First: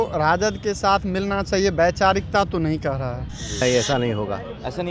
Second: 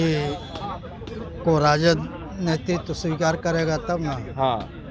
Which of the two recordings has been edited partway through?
first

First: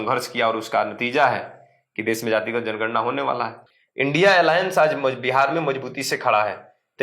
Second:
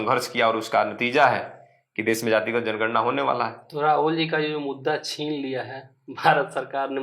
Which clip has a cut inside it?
first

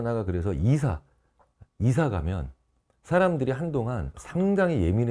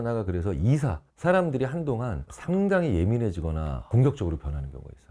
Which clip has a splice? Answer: second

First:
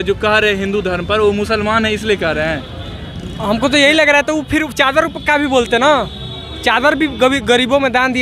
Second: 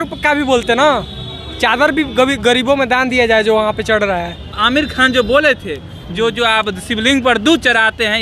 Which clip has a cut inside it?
second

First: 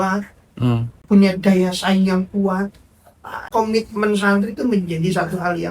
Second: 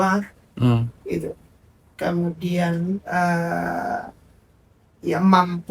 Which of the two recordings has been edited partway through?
first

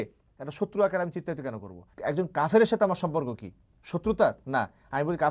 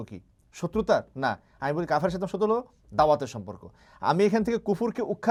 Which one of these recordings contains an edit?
first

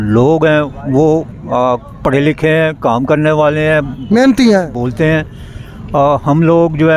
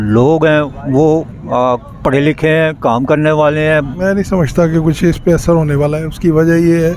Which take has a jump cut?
second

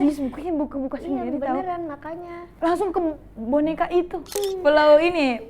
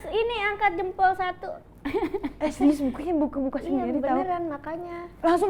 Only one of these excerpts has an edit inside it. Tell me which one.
first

